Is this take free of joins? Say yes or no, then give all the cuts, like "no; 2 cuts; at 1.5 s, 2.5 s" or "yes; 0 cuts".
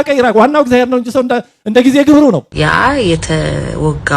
no; 1 cut; at 2.5 s